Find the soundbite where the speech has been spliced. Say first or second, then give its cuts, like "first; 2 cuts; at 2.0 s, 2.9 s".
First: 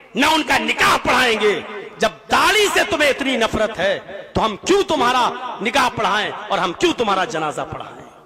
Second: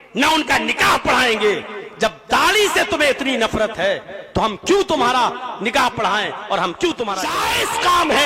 second; 1 cut; at 7.3 s